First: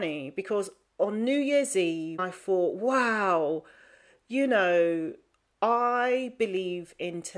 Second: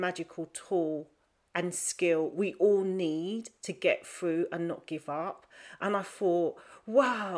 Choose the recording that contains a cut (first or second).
first